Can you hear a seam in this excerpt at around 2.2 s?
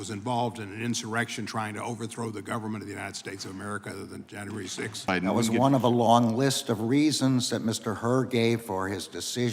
no; 1 cut; at 5.1 s

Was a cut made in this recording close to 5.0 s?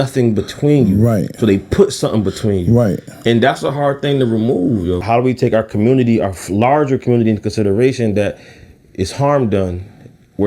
yes; 1 cut; at 5.0 s

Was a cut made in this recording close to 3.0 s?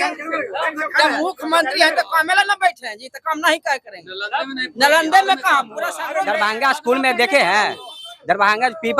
no; 1 cut; at 6.3 s

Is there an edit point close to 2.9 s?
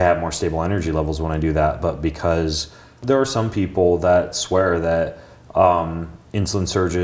yes; 1 cut; at 2.9 s

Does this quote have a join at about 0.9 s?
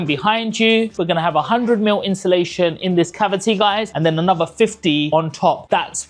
yes; 1 cut; at 0.9 s

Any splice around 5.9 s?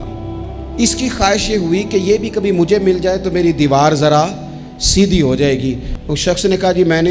yes; 1 cut; at 5.9 s

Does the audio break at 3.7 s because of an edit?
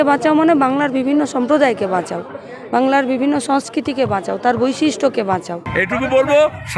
no; 1 cut; at 5.6 s

